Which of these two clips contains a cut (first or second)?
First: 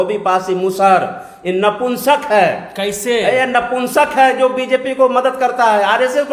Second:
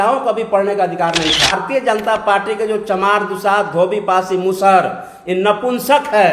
second